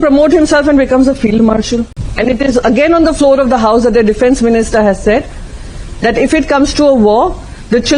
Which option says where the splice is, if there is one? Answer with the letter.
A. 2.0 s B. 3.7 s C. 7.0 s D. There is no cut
A